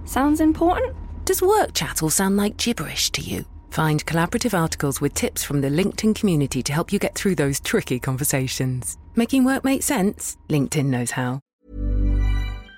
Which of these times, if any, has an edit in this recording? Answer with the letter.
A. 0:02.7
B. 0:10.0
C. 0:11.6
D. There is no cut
C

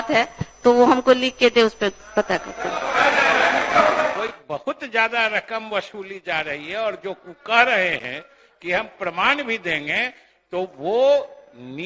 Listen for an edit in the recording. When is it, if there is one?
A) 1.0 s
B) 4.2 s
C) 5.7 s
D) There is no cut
B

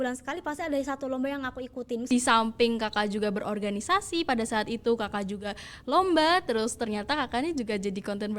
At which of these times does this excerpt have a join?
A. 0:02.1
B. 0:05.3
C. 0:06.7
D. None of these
A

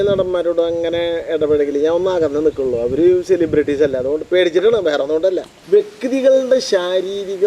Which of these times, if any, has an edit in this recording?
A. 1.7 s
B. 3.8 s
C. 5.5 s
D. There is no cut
C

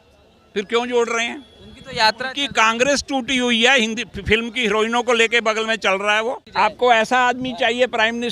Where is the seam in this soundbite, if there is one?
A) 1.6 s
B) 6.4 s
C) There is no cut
B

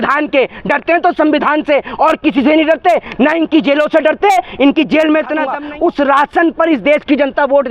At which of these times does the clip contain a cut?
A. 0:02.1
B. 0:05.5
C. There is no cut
B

